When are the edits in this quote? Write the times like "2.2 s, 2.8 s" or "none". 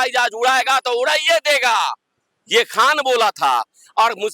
none